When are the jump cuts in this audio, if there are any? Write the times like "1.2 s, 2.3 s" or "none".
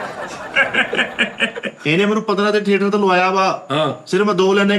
1.7 s